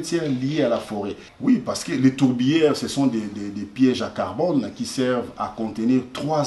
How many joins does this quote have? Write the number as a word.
one